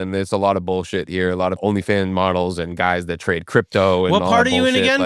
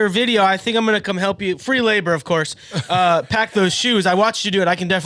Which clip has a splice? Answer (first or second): first